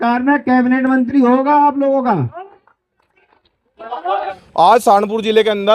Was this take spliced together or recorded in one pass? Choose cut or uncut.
cut